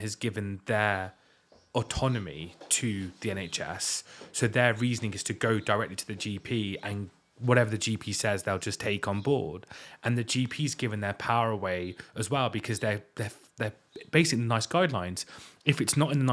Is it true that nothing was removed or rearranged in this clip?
yes; 0 cuts

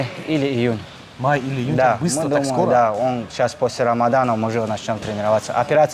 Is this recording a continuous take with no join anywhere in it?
yes; 0 cuts

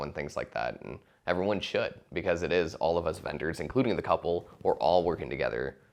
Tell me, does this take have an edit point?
no; 0 cuts

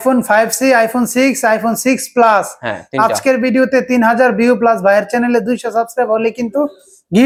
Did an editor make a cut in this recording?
no; 0 cuts

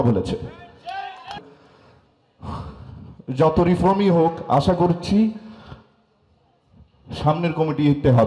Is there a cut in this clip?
yes; 1 cut; at 1.4 s

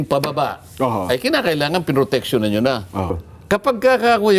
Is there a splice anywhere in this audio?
yes; 1 cut; at 3.2 s

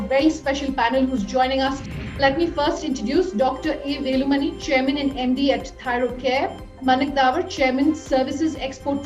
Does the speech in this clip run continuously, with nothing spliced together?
no; 2 cuts; at 1.9 s, 6.8 s

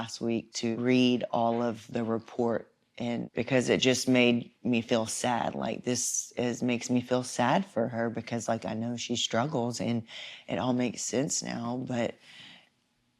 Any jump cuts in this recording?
yes; 3 cuts; at 0.8 s, 1.8 s, 3.3 s

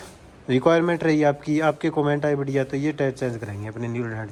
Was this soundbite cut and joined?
no; 0 cuts

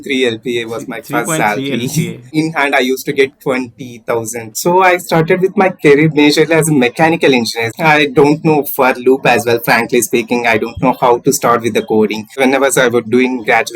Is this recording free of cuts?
no; 4 cuts; at 2.2 s, 4.5 s, 7.6 s, 12.3 s

